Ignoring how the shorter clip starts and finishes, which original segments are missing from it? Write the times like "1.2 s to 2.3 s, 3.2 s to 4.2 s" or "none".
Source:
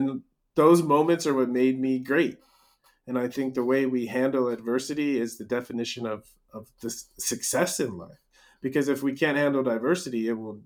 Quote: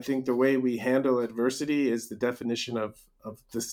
none